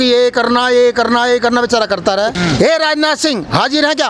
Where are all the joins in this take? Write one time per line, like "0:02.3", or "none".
0:02.4